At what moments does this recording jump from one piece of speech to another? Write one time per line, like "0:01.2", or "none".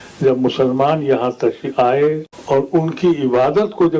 0:02.3